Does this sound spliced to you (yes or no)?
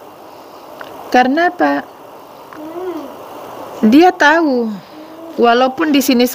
no